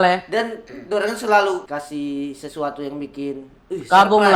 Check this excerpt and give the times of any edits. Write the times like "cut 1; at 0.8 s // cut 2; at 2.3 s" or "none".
cut 1; at 1.7 s